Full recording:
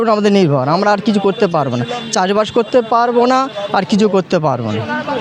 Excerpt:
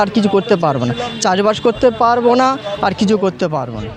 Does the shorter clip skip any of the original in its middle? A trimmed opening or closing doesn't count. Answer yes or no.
no